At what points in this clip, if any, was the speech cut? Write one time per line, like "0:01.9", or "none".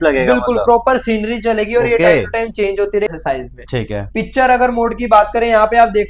0:03.2